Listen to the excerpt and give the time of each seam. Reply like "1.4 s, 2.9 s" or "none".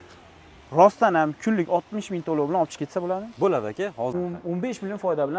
4.1 s